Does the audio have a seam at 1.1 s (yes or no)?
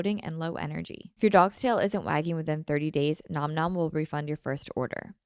yes